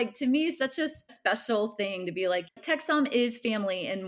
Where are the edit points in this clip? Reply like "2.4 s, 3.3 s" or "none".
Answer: 1.1 s, 2.5 s